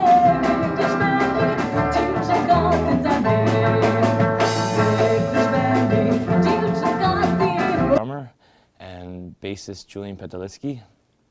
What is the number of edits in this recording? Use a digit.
0